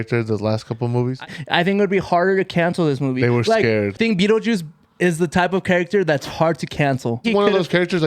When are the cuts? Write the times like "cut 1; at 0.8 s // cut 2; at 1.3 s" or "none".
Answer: cut 1; at 1.2 s // cut 2; at 4.0 s // cut 3; at 7.3 s